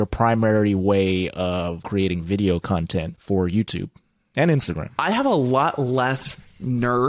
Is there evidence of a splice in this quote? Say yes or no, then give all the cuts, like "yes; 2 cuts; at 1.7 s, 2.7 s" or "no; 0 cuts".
yes; 3 cuts; at 1.8 s, 3.1 s, 4.9 s